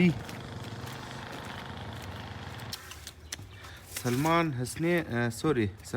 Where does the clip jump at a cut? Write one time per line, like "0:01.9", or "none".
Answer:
0:02.7